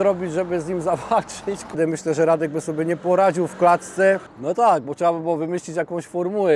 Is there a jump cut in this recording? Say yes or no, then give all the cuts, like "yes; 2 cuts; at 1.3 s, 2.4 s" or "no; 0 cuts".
yes; 2 cuts; at 1.7 s, 4.3 s